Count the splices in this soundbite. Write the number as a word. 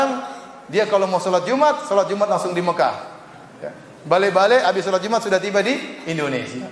zero